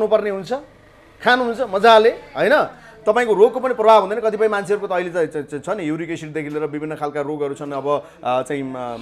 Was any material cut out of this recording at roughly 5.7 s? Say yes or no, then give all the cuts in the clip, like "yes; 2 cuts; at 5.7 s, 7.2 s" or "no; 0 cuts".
no; 0 cuts